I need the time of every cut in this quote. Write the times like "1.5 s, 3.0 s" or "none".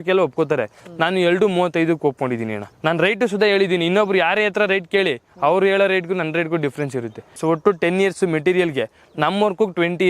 2.6 s, 7.4 s